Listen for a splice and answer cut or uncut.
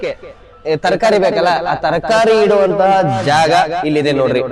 uncut